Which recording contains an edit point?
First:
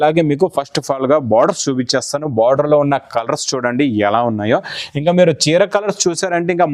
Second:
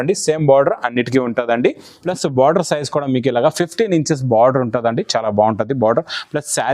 second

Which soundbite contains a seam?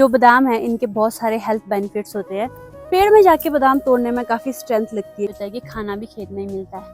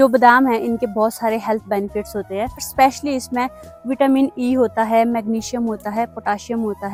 first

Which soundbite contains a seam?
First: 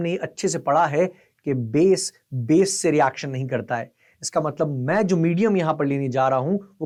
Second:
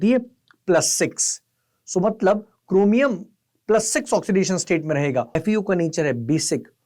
second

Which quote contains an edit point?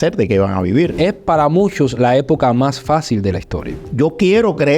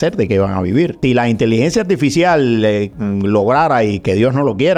first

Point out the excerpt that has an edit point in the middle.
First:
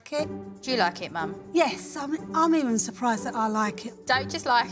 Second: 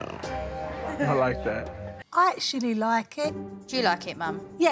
second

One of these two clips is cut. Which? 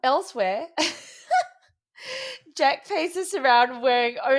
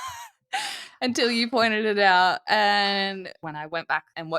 second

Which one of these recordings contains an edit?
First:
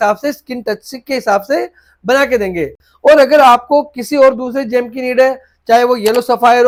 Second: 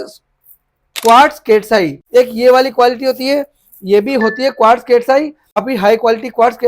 second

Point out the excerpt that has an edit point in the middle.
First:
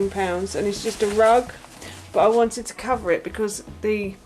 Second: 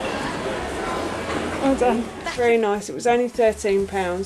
second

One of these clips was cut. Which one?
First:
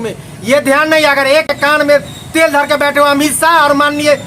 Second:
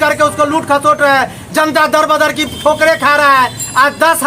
first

